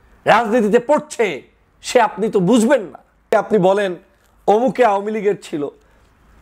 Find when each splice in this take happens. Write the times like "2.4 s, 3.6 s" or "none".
3.3 s